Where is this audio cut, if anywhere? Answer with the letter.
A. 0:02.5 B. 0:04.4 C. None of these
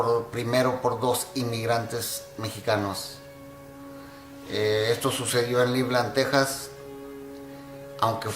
A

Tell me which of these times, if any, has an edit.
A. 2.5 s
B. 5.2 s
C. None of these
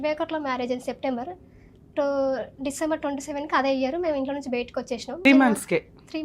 B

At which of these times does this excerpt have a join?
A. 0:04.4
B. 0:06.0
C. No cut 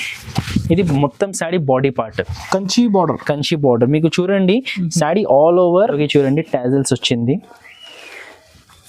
B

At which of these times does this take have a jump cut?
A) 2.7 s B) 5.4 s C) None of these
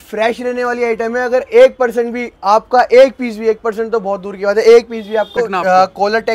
B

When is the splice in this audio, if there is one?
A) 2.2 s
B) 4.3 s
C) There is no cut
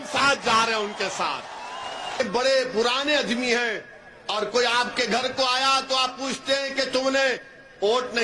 A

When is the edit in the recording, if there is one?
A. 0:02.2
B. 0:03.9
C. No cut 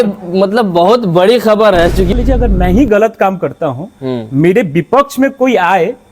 A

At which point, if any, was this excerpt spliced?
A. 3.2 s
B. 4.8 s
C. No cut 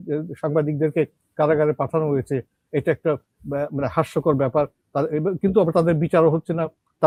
C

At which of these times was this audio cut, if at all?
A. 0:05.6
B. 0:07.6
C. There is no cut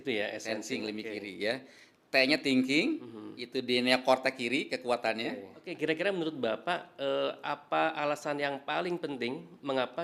A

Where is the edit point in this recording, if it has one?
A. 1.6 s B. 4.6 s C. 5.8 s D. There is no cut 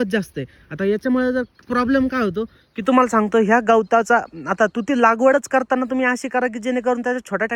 D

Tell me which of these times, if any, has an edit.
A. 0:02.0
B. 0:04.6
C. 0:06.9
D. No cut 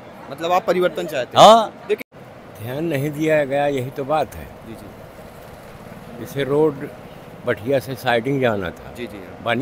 A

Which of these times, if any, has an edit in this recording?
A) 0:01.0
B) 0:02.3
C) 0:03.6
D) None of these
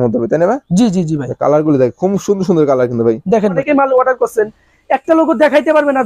C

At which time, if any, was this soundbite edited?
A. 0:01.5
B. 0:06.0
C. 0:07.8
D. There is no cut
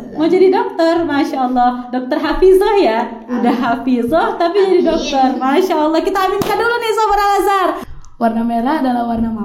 C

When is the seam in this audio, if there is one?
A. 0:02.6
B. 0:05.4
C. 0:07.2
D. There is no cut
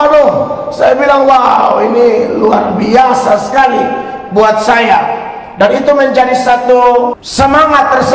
C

